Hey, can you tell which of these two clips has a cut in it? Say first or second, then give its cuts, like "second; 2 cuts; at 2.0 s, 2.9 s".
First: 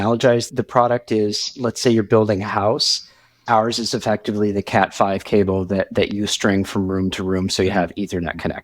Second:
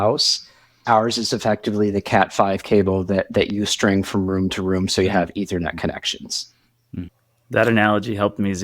second; 1 cut; at 7.1 s